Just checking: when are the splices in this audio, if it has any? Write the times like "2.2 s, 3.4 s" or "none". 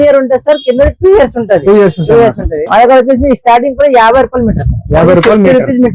2.5 s